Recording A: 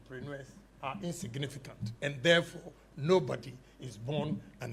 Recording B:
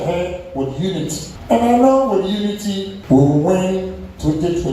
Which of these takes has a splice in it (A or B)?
B